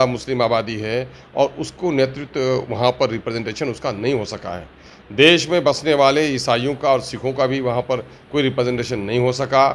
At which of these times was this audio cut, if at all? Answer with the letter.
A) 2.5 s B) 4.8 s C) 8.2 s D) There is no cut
D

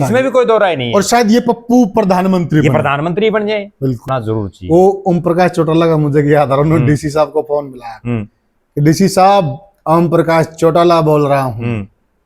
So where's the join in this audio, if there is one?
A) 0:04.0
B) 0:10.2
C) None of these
A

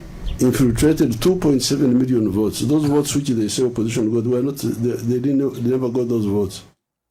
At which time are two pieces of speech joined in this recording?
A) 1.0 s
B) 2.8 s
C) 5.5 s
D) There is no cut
B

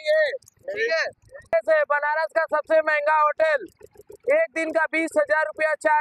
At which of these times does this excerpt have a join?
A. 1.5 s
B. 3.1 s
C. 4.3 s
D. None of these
A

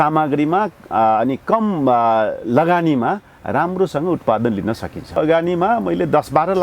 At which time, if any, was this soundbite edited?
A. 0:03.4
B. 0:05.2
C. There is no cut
B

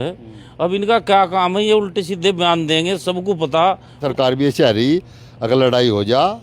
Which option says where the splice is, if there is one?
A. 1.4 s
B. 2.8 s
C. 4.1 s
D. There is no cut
C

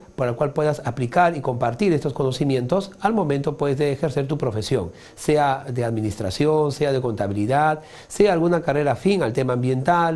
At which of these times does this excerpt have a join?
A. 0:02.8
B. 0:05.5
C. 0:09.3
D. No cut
D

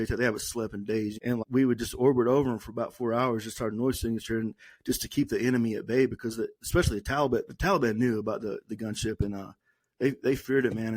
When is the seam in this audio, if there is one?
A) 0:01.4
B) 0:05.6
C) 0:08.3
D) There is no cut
A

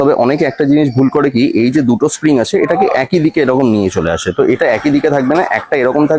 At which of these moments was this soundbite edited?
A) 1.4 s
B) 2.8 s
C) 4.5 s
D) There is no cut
D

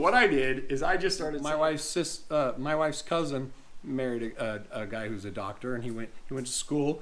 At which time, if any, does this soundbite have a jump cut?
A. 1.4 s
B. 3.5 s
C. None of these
A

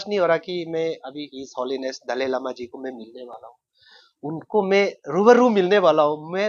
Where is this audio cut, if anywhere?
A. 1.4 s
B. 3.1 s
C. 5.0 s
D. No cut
A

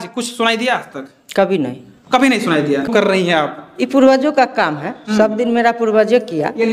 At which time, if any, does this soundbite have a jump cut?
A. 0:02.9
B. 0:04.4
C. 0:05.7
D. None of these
A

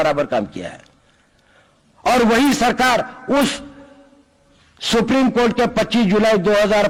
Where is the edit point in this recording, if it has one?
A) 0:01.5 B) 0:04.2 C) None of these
C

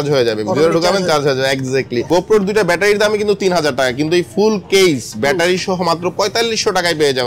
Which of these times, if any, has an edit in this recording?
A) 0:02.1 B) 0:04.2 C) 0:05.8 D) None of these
A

